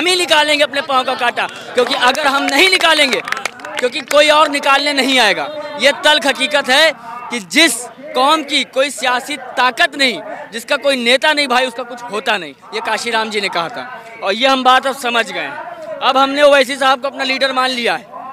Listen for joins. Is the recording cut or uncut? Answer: uncut